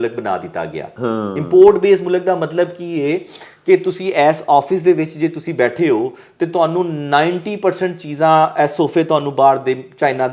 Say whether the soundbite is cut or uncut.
uncut